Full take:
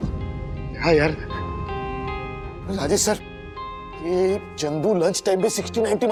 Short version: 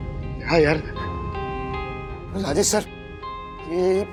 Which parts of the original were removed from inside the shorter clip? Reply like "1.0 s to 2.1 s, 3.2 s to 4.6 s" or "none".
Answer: none